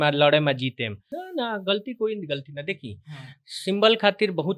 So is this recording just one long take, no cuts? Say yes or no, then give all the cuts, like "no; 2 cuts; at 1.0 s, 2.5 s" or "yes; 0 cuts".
no; 1 cut; at 1.1 s